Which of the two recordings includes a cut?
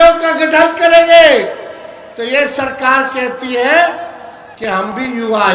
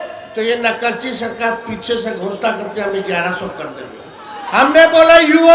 second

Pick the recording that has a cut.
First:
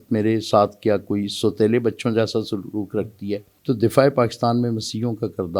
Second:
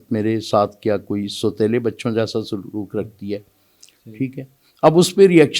first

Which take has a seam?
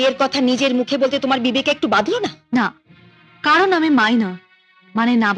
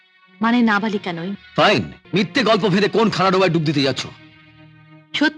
second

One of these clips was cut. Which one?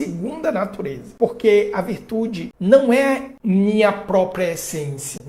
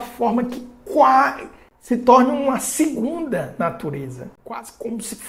first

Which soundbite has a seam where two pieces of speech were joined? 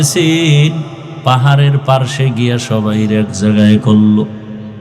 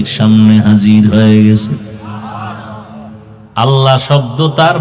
second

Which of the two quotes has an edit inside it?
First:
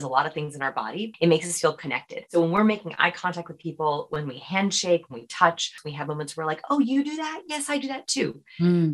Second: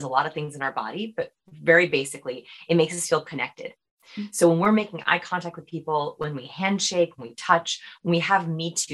first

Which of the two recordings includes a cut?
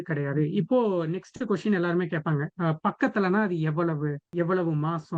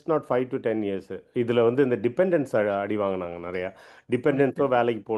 first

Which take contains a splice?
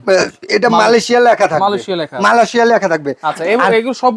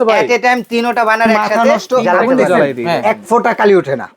second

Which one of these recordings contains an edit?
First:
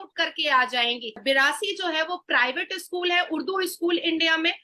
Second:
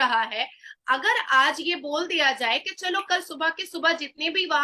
first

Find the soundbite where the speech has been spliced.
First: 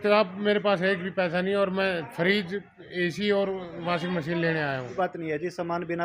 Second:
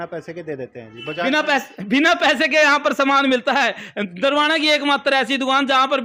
first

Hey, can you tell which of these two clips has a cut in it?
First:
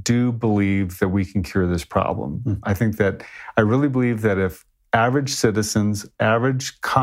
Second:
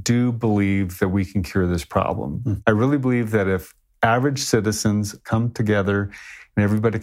second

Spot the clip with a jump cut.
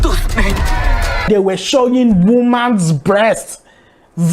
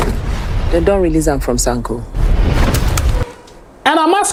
first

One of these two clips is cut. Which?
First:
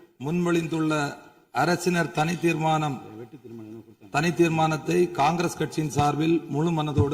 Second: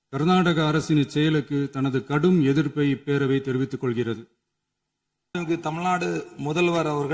second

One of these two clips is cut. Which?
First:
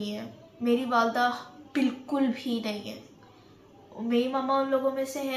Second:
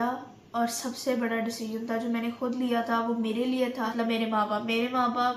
second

